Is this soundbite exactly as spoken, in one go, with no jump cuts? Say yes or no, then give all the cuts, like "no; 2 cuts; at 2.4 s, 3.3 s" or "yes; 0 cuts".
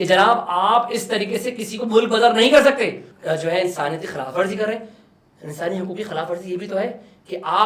no; 1 cut; at 3.1 s